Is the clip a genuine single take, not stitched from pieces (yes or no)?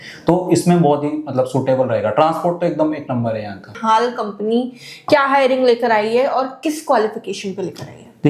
yes